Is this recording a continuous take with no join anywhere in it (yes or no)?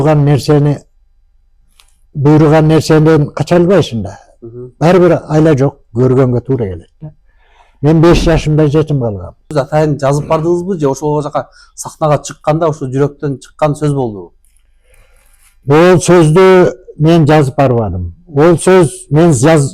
no